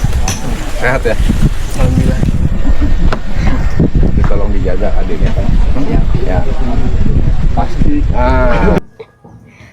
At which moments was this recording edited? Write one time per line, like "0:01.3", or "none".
0:08.8